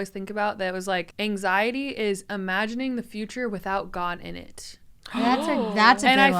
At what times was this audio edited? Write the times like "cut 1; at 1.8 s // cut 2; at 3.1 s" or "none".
cut 1; at 1.1 s